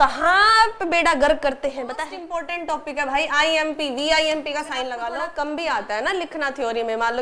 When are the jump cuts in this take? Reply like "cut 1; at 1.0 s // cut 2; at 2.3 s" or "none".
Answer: cut 1; at 2.5 s // cut 2; at 5.2 s